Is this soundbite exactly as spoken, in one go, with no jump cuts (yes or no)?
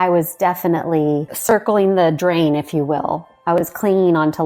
no